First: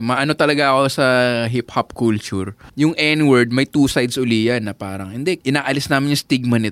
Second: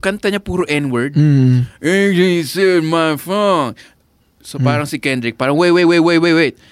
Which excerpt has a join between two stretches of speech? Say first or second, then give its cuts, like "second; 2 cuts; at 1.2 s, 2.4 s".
first; 2 cuts; at 2.6 s, 5.4 s